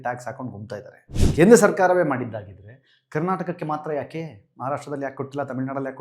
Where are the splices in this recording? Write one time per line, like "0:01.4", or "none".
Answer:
0:01.2